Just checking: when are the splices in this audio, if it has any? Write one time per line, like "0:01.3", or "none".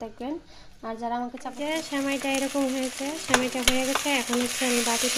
0:01.5